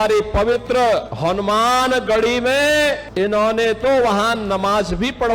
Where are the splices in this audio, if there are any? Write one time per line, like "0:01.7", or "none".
0:01.1
0:03.0